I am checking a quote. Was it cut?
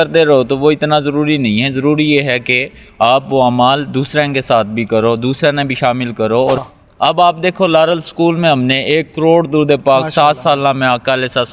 yes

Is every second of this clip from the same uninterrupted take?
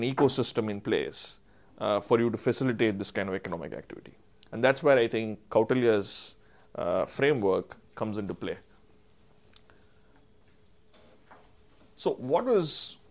yes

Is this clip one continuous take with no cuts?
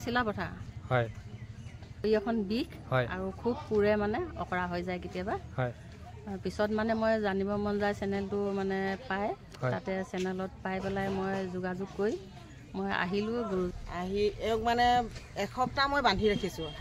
no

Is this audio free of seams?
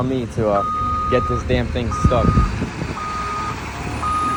yes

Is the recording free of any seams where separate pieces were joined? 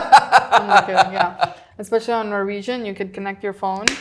yes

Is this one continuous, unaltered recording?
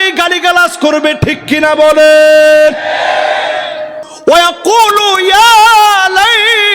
no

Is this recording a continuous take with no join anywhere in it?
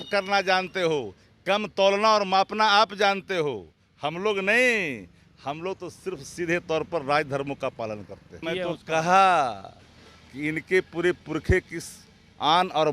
no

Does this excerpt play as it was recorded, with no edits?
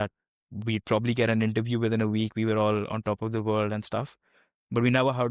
yes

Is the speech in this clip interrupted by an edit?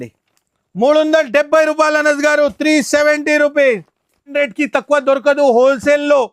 yes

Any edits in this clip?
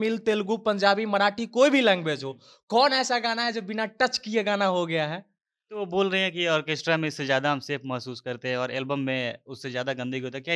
no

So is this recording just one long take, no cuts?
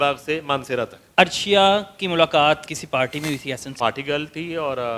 no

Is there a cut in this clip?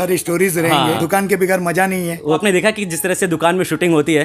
yes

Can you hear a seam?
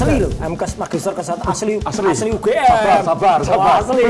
no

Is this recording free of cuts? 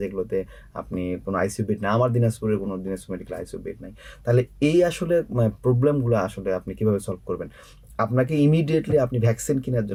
yes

